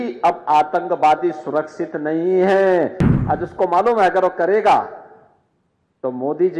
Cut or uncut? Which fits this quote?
cut